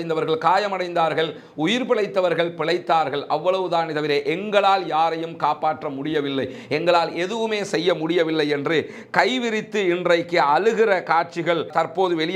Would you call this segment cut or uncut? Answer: uncut